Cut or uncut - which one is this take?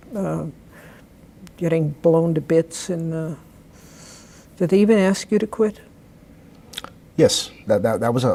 uncut